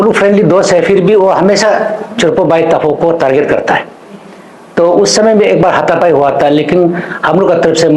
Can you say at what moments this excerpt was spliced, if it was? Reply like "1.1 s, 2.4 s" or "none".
none